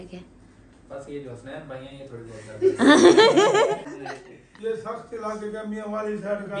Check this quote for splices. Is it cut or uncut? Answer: cut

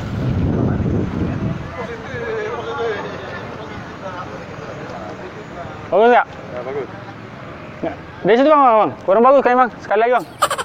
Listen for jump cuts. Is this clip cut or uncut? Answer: uncut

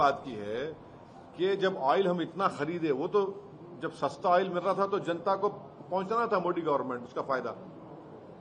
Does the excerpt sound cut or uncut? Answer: uncut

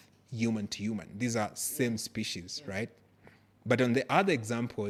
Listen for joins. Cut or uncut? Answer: uncut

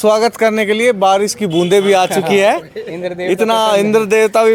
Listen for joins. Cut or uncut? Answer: uncut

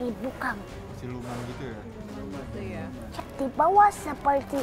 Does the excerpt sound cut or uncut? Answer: cut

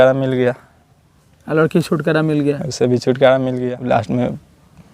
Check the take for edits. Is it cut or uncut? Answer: cut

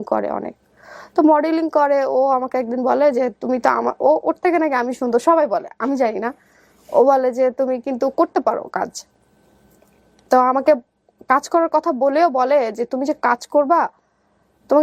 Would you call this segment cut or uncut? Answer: uncut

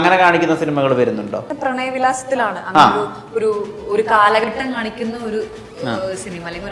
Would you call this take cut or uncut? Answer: cut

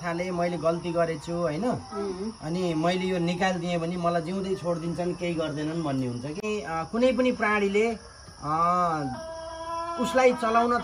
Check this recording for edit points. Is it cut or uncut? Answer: cut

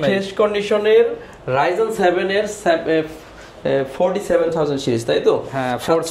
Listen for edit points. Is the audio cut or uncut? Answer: uncut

